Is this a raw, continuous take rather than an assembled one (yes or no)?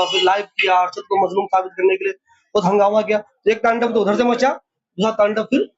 yes